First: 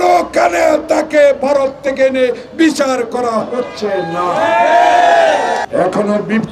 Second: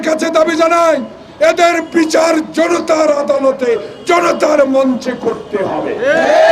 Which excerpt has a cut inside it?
first; 1 cut; at 5.6 s

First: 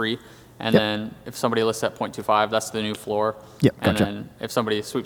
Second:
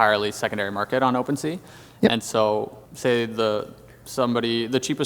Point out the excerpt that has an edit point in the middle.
second; 1 cut; at 2.8 s

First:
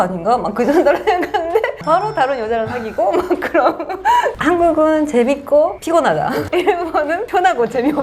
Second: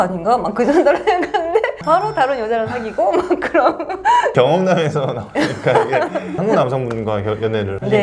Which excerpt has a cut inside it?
first; 1 cut; at 4.3 s

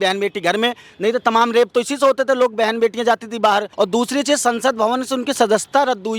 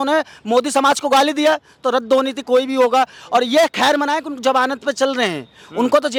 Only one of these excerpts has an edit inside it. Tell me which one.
first; 1 cut; at 3.7 s

